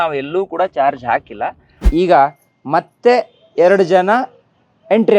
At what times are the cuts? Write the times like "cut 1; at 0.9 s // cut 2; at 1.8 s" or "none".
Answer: cut 1; at 1.8 s

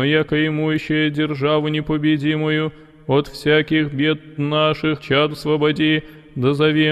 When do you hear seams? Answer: none

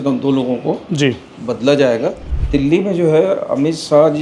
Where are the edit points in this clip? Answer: cut 1; at 2.2 s

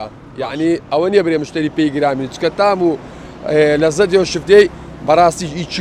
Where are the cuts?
none

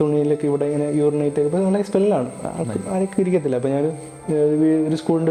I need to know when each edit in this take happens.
none

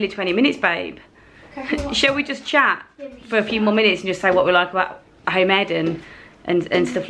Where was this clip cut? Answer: none

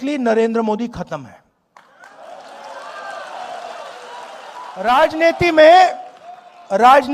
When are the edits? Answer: cut 1; at 4.8 s

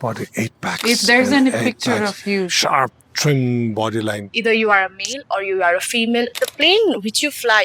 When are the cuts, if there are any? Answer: cut 1; at 3.1 s // cut 2; at 4.2 s

